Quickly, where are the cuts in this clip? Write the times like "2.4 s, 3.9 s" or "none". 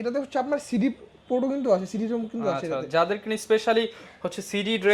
none

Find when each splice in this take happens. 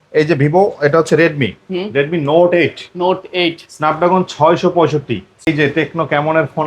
5.5 s

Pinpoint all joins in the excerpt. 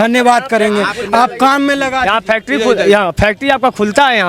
none

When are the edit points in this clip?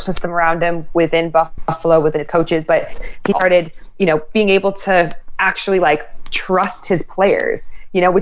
none

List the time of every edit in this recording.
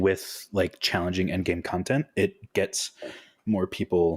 none

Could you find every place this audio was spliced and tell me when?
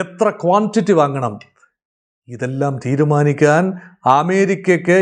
none

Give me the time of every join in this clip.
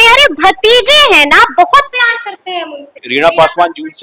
3.0 s

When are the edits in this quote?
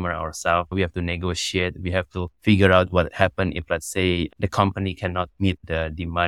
none

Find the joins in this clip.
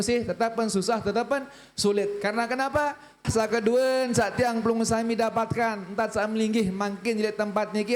3.1 s

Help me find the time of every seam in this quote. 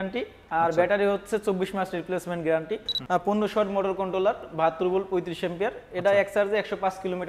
2.9 s

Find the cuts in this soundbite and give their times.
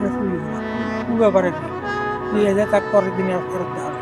none

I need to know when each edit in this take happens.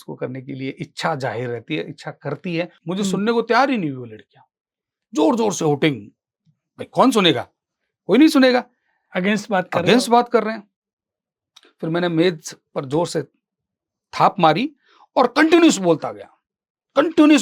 2.8 s

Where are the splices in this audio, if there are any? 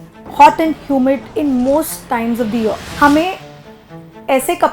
1.3 s, 2.8 s

